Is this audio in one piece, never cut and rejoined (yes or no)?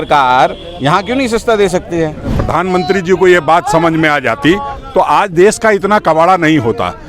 no